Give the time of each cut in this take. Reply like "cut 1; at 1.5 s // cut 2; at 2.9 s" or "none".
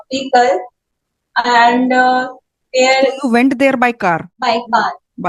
cut 1; at 4.3 s